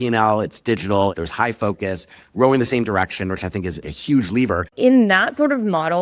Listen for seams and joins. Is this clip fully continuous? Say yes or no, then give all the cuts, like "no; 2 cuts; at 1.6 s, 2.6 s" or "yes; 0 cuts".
no; 3 cuts; at 1.1 s, 3.9 s, 4.7 s